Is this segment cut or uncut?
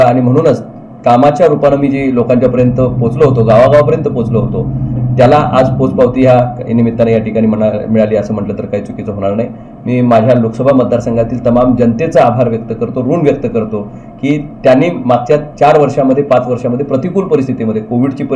uncut